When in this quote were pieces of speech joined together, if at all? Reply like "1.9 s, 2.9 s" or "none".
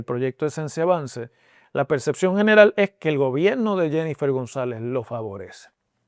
none